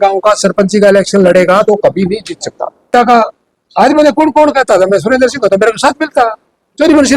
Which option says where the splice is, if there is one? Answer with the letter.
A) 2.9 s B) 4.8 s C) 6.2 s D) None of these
A